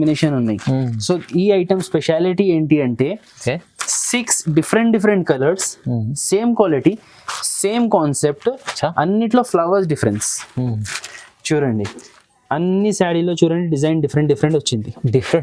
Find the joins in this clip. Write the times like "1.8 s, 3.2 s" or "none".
none